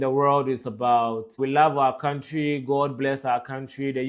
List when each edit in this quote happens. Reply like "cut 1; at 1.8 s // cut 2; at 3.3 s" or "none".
cut 1; at 1.4 s